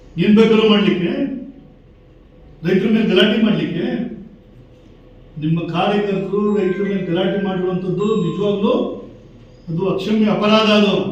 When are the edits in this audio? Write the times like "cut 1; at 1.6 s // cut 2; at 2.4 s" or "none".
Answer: none